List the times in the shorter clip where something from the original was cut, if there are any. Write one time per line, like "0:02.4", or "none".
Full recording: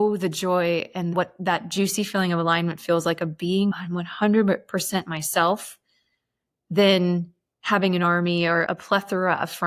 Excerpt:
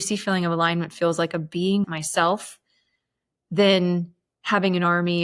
0:02.0